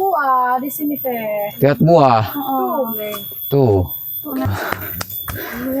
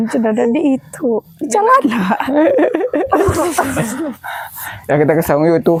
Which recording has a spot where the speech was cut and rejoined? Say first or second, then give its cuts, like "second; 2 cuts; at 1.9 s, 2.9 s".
first; 1 cut; at 4.5 s